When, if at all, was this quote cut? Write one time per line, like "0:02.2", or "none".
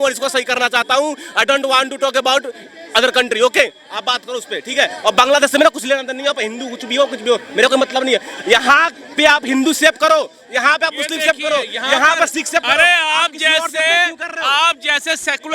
none